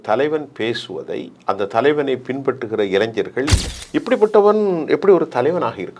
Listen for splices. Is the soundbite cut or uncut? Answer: cut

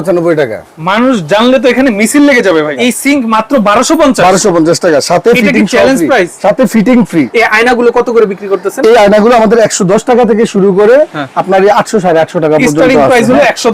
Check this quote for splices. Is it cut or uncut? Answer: cut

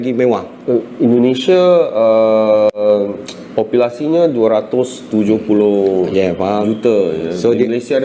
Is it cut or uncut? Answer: uncut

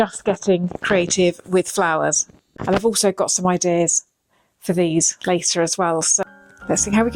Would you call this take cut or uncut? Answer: cut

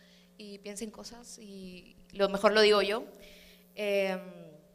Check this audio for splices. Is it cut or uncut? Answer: cut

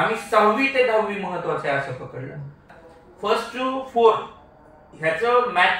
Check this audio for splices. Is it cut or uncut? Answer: cut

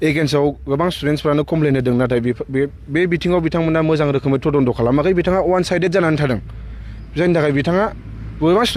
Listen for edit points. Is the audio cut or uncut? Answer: uncut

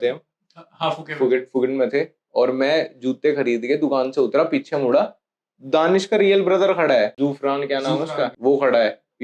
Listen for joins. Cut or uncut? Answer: cut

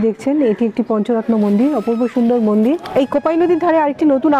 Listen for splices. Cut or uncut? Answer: cut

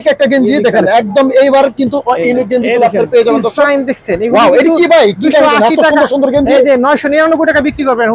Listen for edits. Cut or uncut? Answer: uncut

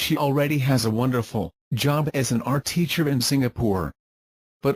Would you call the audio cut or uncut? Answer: uncut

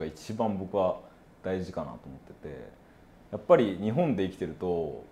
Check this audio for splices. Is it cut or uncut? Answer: uncut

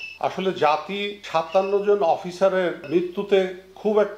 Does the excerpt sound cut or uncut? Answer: cut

